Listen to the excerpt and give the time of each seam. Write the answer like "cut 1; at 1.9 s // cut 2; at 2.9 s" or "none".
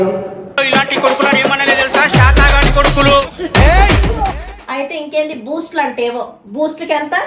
cut 1; at 4.5 s

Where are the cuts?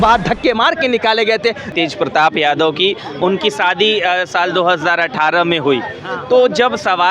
cut 1; at 1.7 s

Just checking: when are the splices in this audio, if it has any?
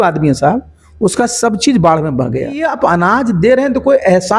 cut 1; at 2.7 s

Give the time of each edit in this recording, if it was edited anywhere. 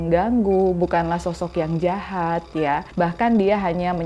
cut 1; at 2.9 s

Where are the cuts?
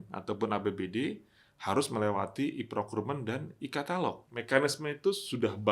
cut 1; at 4.3 s

